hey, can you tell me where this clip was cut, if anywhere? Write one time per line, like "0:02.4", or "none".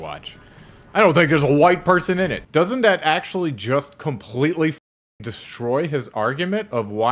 0:02.4